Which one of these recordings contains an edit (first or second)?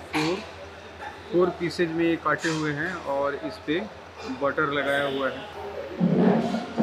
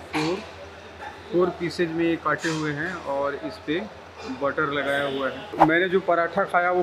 second